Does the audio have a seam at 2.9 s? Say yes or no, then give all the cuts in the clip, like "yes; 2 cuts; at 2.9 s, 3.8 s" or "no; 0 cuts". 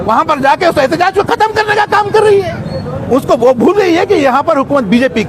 no; 0 cuts